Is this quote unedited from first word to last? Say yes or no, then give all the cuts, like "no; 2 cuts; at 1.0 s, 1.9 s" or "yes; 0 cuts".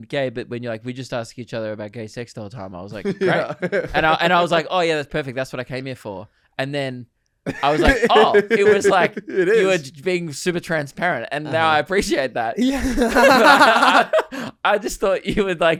yes; 0 cuts